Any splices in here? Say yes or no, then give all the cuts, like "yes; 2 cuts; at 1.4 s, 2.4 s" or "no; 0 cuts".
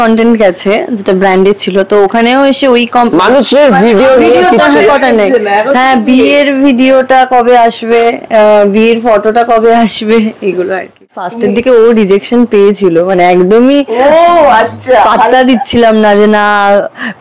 yes; 1 cut; at 11.2 s